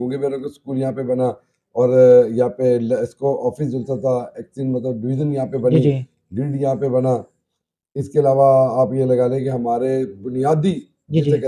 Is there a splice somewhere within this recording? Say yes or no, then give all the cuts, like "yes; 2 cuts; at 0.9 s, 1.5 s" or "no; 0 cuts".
no; 0 cuts